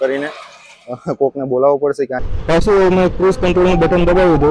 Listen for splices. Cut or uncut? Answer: cut